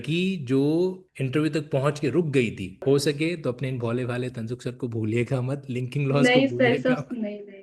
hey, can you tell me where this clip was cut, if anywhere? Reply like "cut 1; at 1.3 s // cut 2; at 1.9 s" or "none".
cut 1; at 1.0 s // cut 2; at 2.8 s